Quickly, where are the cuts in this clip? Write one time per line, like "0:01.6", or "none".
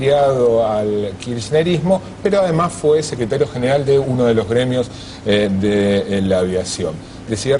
none